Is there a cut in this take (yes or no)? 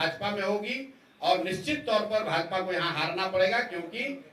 no